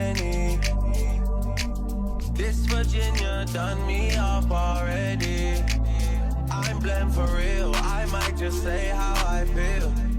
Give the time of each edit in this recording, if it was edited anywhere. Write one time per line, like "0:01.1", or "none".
none